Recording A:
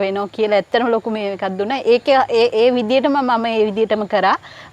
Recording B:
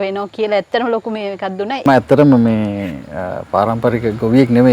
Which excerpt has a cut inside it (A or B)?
B